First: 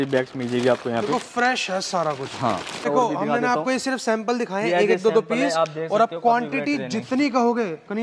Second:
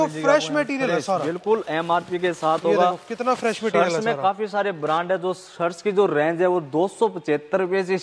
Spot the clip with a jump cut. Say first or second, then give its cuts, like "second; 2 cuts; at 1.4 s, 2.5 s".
first; 1 cut; at 2.9 s